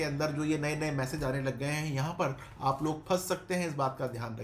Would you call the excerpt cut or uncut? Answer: uncut